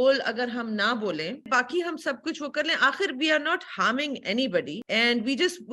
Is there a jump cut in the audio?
yes; 2 cuts; at 1.5 s, 4.8 s

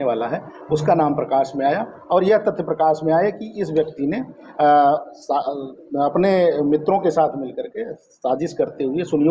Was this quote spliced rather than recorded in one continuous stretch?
no; 0 cuts

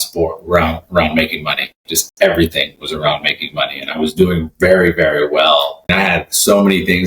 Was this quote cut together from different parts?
yes; 1 cut; at 5.9 s

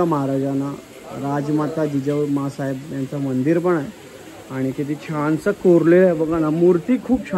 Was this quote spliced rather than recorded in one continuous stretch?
no; 0 cuts

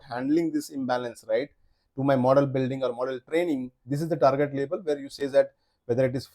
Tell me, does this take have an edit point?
yes; 1 cut; at 3.8 s

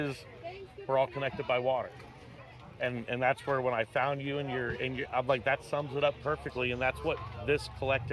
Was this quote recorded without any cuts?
yes; 0 cuts

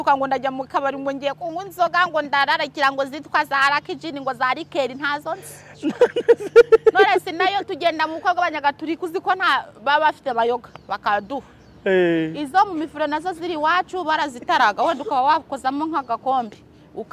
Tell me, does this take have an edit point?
no; 0 cuts

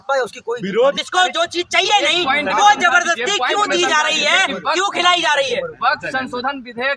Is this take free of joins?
yes; 0 cuts

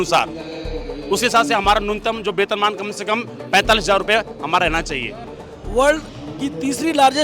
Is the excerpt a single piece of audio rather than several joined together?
no; 1 cut; at 5.2 s

